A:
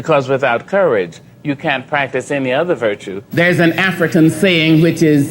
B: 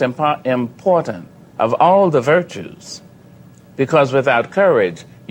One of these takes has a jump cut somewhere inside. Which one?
A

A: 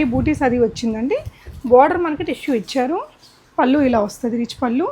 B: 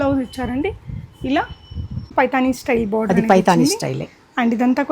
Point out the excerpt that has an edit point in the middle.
B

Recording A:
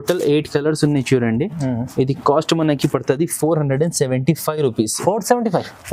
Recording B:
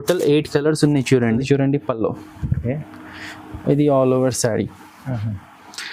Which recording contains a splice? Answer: B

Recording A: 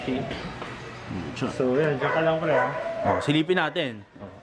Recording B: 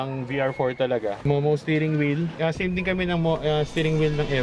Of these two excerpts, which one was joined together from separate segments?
B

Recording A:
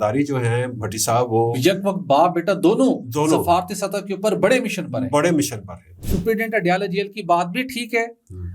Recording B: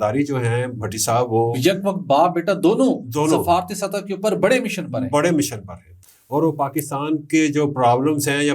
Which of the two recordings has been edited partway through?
A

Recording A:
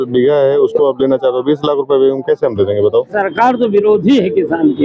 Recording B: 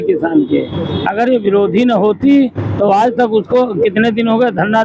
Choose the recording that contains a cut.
A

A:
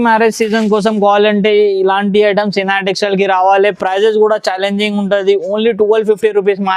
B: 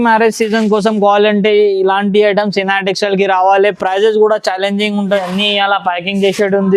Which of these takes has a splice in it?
B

